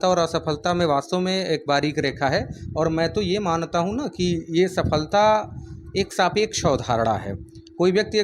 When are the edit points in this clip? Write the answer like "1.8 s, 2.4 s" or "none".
none